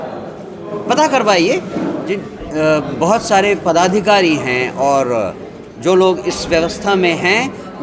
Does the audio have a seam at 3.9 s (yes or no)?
no